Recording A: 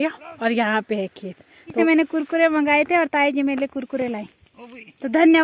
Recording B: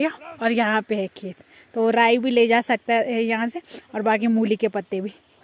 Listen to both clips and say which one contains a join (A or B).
A